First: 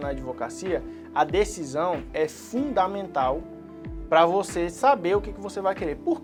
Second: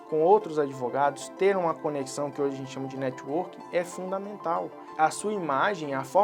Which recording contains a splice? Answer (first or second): second